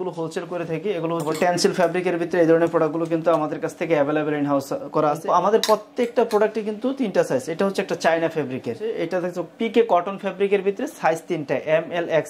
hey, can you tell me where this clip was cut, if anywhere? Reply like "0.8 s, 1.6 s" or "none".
1.3 s, 5.2 s, 9.0 s